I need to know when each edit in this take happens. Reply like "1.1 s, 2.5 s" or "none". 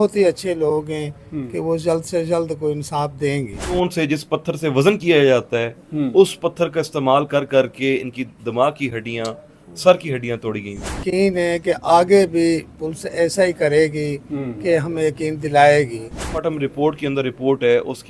3.7 s, 11.0 s, 16.2 s